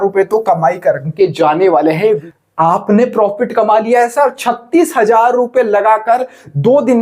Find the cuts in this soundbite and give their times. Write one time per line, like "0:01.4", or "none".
0:02.3